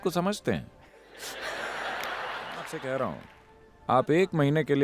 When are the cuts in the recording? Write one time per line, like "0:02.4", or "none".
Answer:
0:02.7